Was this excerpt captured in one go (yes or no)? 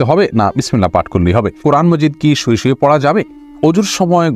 no